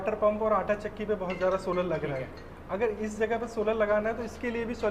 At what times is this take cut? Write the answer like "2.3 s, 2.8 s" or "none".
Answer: none